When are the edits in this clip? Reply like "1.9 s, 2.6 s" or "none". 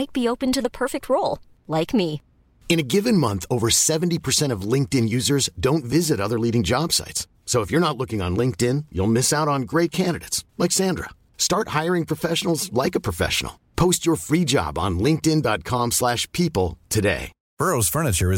17.4 s